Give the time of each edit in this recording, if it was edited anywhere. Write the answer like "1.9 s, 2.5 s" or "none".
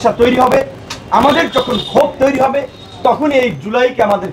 none